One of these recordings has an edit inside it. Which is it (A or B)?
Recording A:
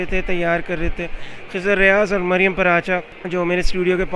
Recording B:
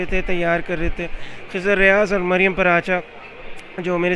A